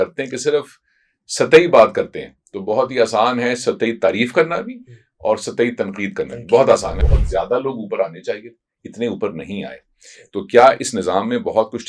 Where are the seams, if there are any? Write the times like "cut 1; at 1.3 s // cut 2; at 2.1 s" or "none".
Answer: cut 1; at 7.0 s